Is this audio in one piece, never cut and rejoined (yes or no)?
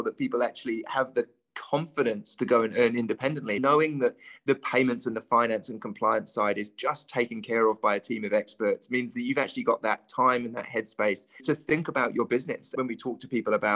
no